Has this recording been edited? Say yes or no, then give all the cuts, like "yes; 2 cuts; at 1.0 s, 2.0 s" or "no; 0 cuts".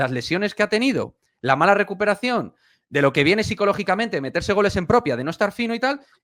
no; 0 cuts